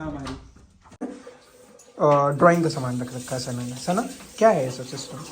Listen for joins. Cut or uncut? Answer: cut